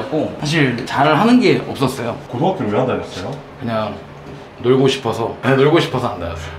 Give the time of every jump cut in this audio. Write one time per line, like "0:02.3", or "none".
none

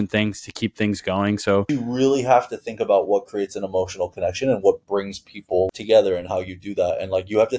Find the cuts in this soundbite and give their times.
0:01.7
0:05.7

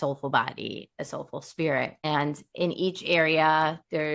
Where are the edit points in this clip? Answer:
0:02.1

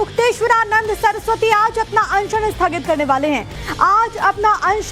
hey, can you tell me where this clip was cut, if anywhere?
none

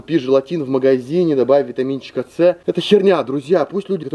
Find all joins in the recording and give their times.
none

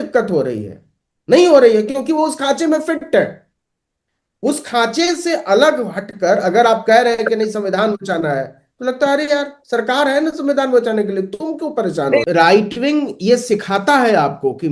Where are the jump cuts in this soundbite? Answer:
0:12.2

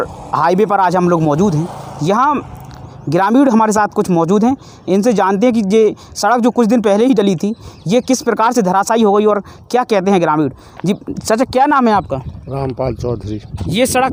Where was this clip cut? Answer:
none

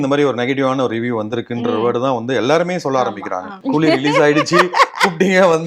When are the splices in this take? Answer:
0:03.6

